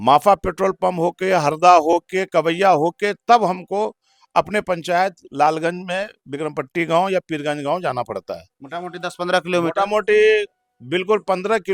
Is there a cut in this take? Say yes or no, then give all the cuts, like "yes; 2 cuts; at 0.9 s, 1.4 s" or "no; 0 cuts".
no; 0 cuts